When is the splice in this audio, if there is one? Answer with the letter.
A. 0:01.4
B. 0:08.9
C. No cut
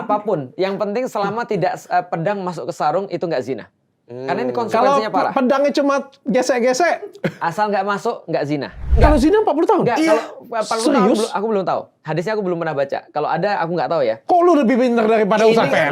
B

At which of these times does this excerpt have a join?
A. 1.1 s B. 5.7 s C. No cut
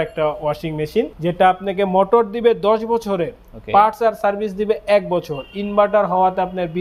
A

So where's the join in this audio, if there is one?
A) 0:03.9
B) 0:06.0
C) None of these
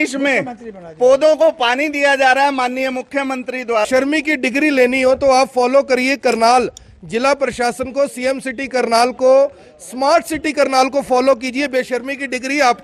A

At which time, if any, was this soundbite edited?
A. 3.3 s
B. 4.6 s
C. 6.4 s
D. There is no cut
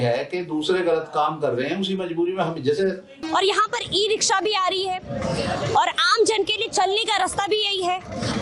A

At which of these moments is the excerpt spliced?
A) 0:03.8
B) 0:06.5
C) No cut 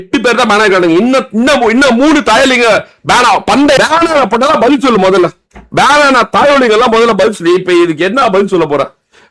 A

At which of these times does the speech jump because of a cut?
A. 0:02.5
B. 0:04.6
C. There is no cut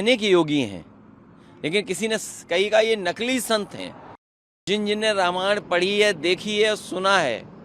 B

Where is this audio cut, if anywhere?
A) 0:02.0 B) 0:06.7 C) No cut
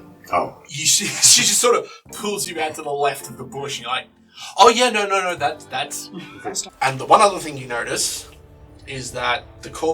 B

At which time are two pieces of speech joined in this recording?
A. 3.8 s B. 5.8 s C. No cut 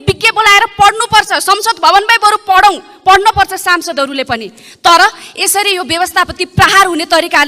C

